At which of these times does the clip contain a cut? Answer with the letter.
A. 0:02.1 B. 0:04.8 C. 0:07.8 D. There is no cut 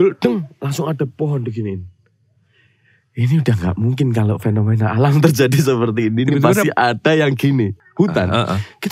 C